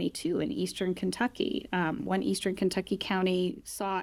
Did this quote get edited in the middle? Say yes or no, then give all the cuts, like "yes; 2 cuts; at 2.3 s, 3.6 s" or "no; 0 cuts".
no; 0 cuts